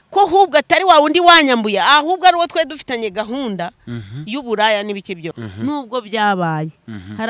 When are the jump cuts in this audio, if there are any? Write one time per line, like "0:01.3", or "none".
0:05.3